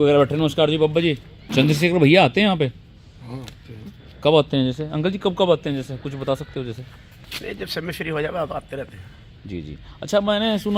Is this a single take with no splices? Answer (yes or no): no